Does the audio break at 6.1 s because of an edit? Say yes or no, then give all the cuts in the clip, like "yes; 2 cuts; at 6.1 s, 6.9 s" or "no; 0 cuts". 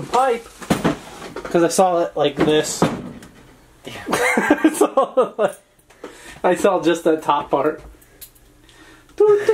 no; 0 cuts